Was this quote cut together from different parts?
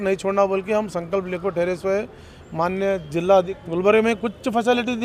yes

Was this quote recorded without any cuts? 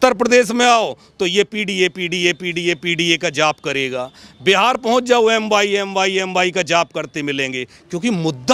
yes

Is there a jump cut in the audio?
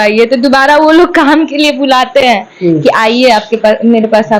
no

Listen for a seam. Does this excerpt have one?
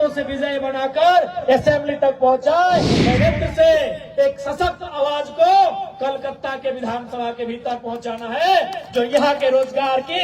yes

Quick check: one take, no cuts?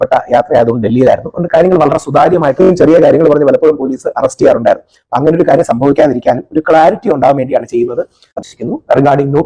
no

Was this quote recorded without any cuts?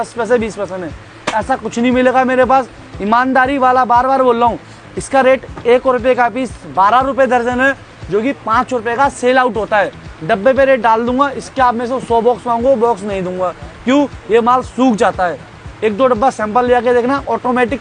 yes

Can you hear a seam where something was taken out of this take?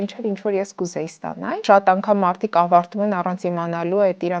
yes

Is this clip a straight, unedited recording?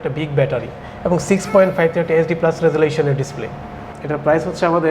no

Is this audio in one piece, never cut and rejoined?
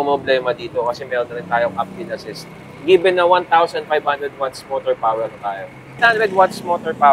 no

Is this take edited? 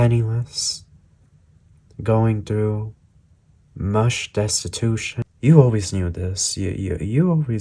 yes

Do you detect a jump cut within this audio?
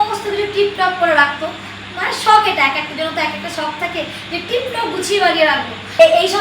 no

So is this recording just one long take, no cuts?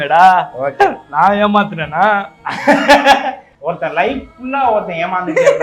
no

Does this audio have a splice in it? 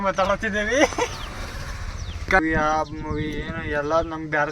yes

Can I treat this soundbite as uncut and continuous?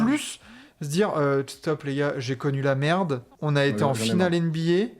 no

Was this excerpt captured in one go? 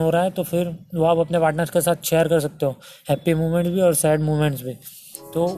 yes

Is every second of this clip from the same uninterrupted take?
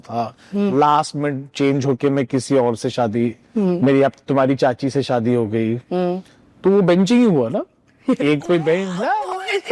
yes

